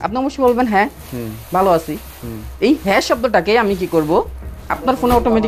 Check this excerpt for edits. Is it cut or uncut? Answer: uncut